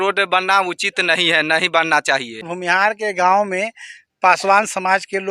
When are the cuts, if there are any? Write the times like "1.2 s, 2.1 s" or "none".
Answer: 2.5 s